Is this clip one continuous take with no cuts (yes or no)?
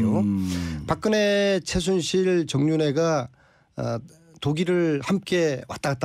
yes